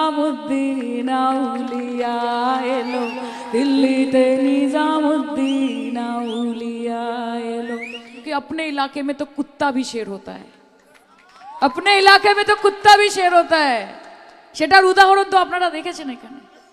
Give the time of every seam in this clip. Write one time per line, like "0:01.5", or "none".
0:08.2